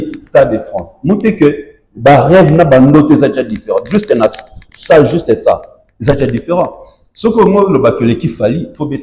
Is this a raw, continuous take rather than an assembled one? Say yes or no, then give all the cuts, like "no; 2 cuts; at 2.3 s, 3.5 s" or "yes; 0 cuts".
yes; 0 cuts